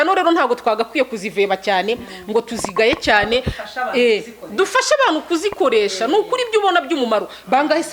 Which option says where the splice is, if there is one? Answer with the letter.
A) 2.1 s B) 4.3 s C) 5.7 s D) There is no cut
D